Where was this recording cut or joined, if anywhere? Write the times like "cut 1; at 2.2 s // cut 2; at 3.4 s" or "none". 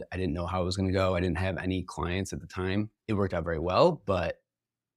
cut 1; at 3.0 s